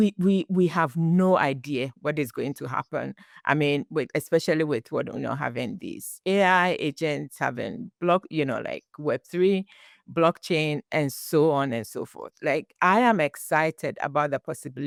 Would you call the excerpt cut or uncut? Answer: uncut